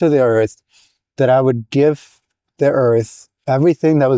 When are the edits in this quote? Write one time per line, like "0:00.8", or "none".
none